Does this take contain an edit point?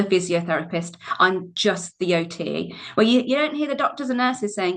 no; 0 cuts

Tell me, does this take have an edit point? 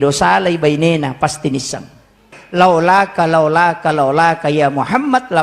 yes; 1 cut; at 2.3 s

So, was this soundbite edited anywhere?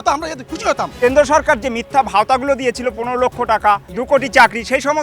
yes; 2 cuts; at 0.9 s, 3.9 s

